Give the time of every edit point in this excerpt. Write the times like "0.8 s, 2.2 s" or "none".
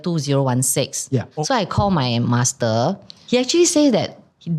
1.3 s